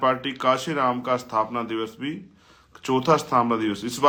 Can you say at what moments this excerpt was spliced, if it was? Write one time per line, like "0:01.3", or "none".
none